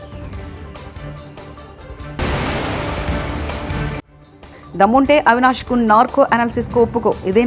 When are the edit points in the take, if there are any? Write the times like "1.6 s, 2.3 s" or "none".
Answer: none